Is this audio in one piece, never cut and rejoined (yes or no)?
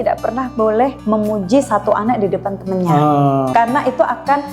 no